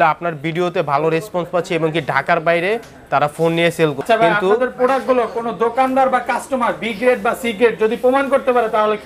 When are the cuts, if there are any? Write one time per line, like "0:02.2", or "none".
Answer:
0:04.0